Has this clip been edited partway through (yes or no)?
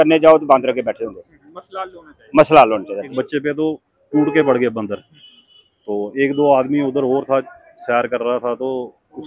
yes